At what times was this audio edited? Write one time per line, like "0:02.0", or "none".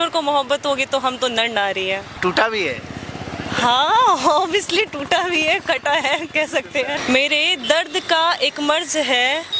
0:02.2
0:07.0